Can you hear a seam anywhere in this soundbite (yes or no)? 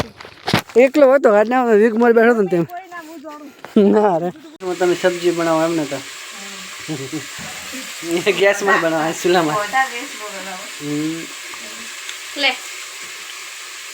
yes